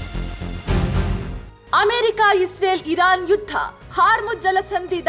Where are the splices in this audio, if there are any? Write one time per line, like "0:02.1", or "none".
0:01.3